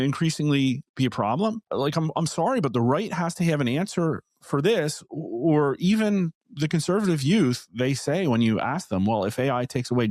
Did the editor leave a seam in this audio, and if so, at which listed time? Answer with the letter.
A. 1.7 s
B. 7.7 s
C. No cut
A